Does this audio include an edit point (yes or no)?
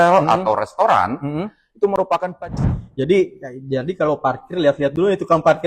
yes